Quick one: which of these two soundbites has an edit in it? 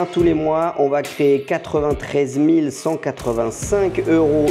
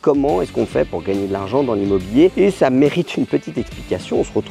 second; 1 cut; at 2.3 s

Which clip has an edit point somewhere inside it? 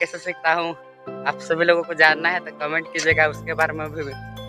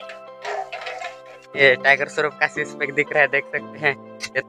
second; 1 cut; at 1.6 s

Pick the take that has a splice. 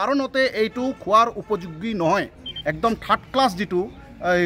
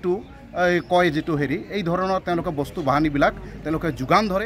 first; 1 cut; at 2.5 s

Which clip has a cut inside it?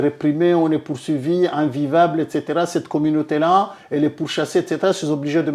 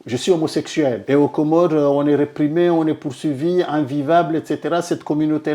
second; 1 cut; at 1.0 s

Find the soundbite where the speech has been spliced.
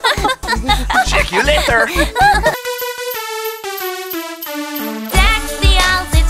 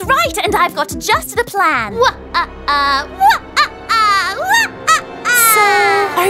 first; 1 cut; at 2.5 s

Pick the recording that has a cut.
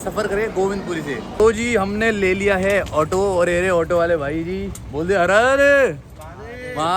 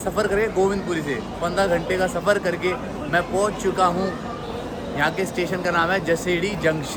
first; 1 cut; at 1.2 s

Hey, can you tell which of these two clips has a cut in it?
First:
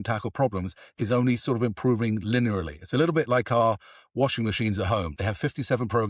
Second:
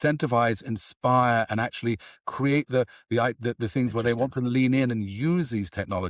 first; 1 cut; at 5.1 s

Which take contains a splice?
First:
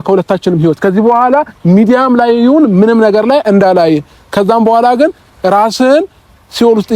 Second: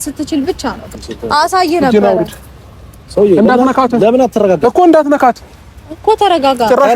second; 1 cut; at 0.9 s

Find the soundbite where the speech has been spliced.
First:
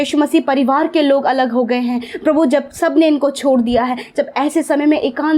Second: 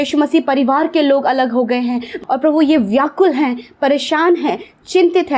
second; 1 cut; at 2.1 s

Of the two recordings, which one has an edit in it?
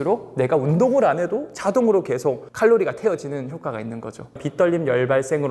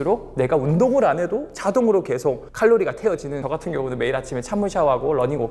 second; 1 cut; at 3.4 s

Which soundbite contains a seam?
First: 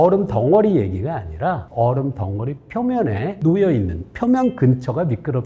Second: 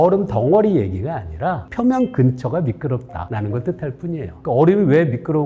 second; 3 cuts; at 1.6 s, 3.2 s, 4.3 s

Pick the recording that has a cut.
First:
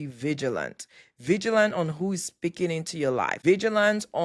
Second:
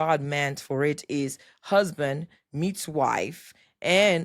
first; 1 cut; at 3.3 s

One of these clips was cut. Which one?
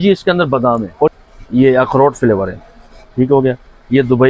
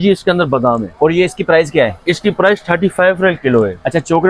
first; 1 cut; at 1.1 s

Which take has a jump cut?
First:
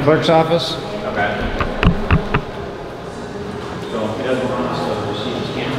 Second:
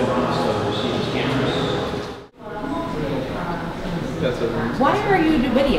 second; 1 cut; at 2.3 s

